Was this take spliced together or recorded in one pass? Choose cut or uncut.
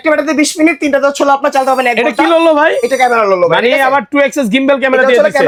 uncut